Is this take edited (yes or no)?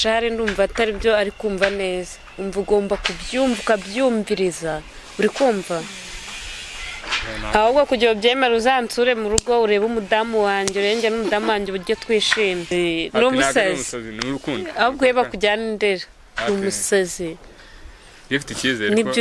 yes